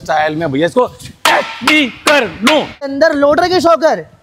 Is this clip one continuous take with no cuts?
no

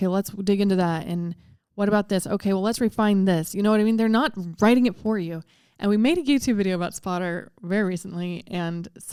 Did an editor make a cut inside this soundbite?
no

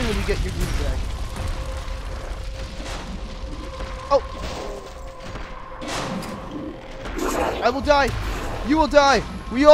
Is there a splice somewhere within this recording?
no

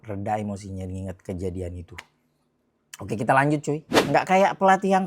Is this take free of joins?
no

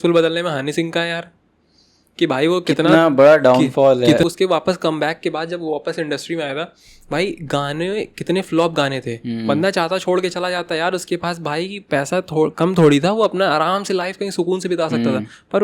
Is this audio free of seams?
no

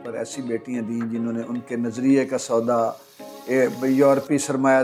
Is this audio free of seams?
yes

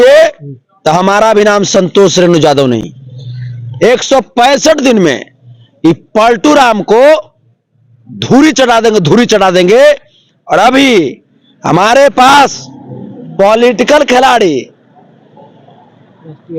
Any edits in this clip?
no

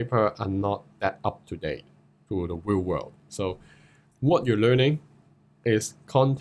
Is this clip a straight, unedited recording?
yes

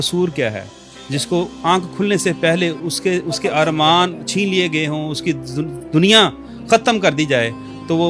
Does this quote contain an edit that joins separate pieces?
no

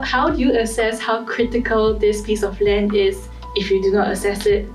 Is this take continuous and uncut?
yes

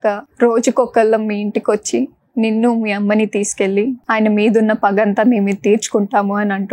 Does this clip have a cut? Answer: yes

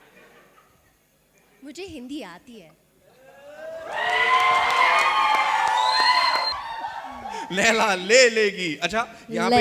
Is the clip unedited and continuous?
no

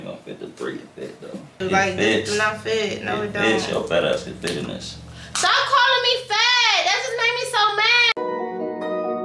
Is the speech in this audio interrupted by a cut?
yes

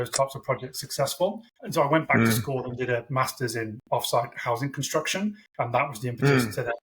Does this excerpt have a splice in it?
yes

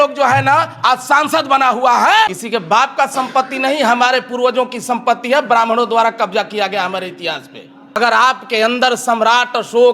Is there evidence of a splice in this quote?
yes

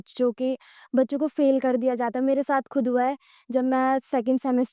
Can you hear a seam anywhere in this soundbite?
no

